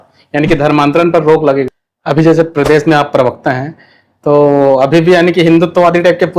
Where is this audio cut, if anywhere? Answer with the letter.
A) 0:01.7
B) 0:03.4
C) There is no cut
A